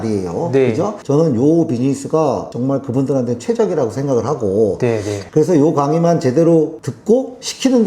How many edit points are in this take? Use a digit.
0